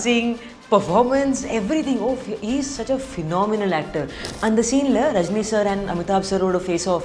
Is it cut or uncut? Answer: cut